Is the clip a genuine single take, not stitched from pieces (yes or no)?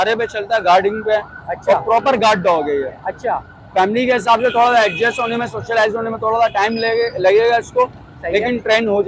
yes